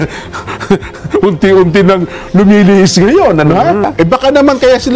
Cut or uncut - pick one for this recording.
cut